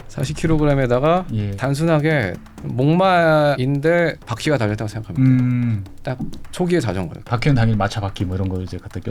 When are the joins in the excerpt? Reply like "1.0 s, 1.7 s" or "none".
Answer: 1.5 s, 7.2 s

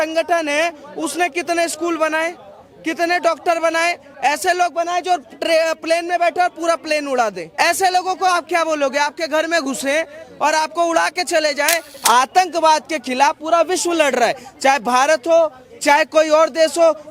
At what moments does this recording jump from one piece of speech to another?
4.1 s, 7.4 s, 11.9 s

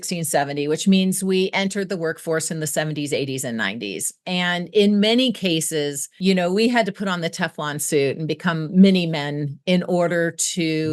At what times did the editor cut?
none

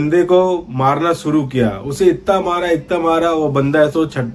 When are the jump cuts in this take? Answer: none

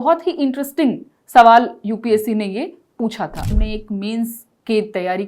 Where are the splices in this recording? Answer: 3.5 s

